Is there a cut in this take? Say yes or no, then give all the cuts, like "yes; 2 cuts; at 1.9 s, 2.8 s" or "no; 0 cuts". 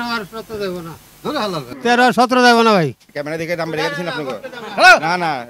yes; 1 cut; at 3.0 s